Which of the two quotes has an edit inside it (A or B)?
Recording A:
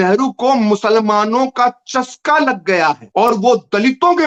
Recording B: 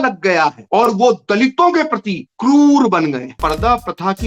B